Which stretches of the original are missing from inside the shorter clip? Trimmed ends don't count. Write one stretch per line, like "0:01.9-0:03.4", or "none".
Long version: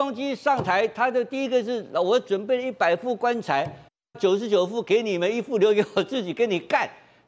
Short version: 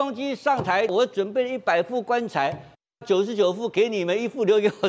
0:00.9-0:02.0